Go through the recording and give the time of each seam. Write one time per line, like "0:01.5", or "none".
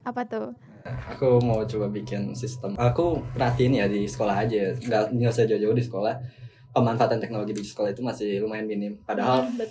0:02.7